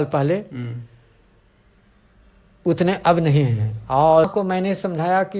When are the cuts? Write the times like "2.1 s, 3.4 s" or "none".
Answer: 4.2 s